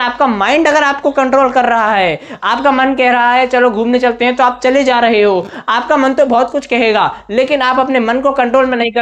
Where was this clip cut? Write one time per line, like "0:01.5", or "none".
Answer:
none